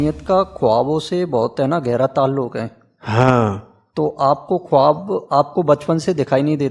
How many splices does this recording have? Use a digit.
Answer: 0